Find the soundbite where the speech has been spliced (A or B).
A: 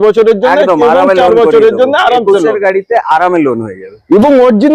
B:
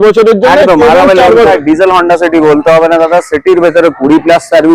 B